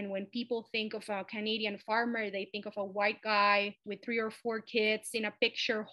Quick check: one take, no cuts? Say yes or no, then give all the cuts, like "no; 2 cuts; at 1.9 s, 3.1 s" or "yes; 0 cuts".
yes; 0 cuts